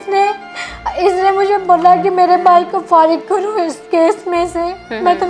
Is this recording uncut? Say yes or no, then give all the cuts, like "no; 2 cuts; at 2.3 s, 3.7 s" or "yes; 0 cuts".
yes; 0 cuts